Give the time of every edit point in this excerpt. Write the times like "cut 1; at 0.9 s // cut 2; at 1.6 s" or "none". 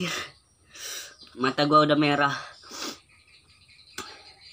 none

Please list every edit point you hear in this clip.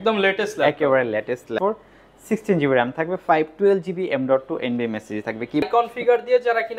cut 1; at 1.5 s // cut 2; at 5.6 s

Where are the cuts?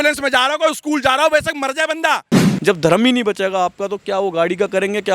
cut 1; at 2.4 s

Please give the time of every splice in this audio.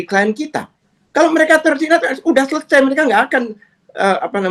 none

